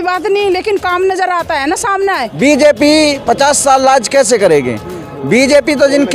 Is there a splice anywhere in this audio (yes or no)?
yes